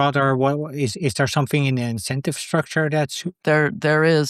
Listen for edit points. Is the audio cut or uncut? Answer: cut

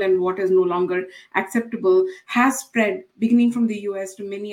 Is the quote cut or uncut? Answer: uncut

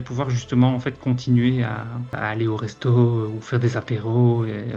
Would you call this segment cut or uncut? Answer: uncut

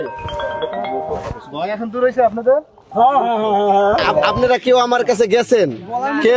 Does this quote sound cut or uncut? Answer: cut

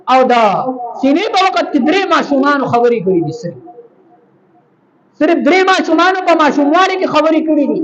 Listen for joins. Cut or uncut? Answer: uncut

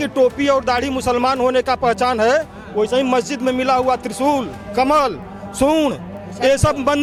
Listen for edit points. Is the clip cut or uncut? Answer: uncut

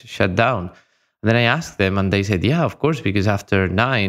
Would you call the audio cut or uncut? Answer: uncut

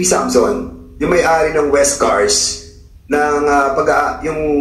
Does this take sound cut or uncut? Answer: uncut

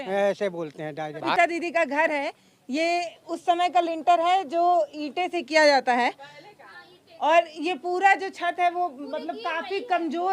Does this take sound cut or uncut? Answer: cut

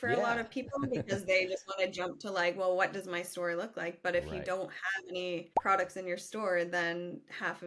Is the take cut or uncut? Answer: cut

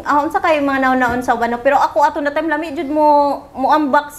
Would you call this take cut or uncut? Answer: uncut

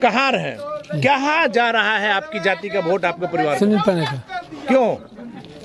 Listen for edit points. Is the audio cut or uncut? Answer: uncut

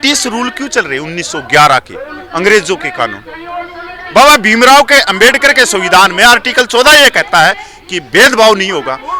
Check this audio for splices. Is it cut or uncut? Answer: uncut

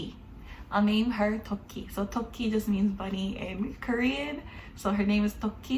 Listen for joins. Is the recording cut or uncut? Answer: uncut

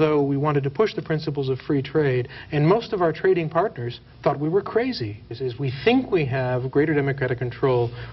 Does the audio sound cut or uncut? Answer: cut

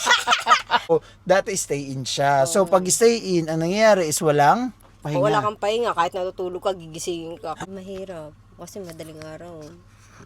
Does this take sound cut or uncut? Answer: cut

